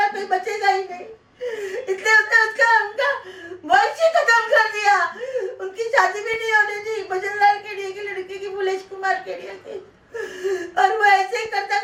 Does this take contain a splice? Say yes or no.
no